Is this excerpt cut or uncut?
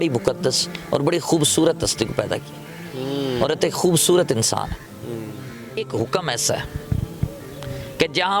cut